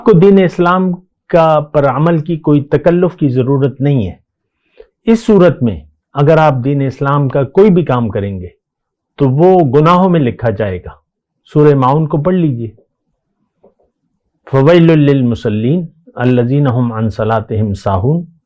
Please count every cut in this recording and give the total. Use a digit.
0